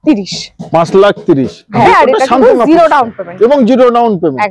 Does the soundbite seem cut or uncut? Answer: cut